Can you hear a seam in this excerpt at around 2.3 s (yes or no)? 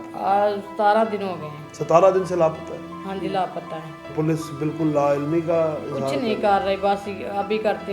no